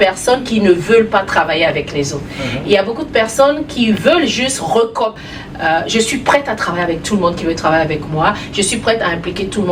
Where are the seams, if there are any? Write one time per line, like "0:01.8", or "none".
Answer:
0:05.2